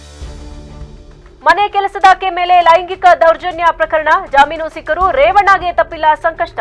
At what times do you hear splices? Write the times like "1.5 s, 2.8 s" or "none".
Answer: 1.2 s

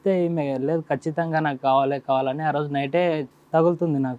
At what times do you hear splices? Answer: 3.3 s

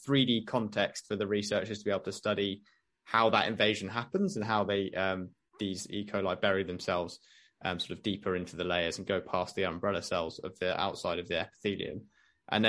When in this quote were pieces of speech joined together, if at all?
none

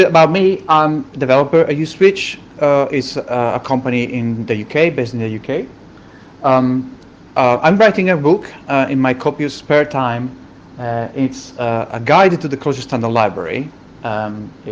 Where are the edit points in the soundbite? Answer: 10.3 s

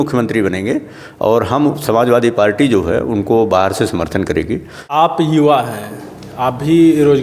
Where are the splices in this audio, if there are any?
4.9 s

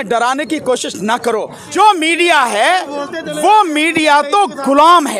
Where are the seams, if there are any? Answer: 1.6 s

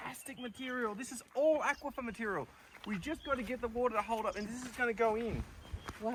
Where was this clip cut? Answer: none

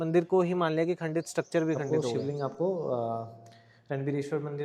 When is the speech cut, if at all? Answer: 1.8 s

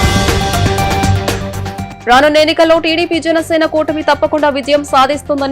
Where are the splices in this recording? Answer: 1.8 s

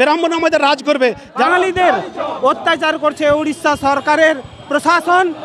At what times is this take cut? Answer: 1.5 s

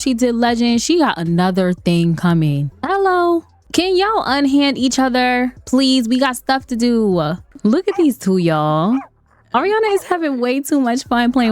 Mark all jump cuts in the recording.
2.7 s, 3.6 s, 7.4 s

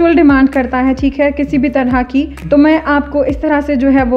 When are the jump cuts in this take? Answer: 2.4 s

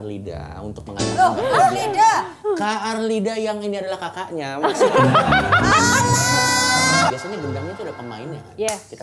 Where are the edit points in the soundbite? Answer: 7.1 s

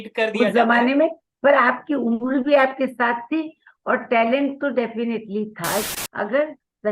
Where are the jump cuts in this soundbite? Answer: 5.9 s

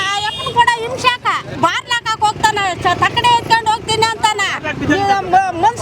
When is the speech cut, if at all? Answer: 1.5 s

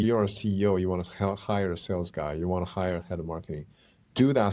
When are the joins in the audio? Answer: none

